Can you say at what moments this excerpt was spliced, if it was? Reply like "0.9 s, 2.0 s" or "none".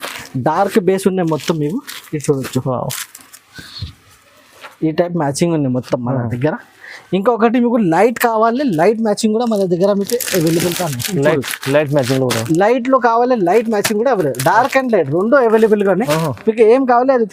none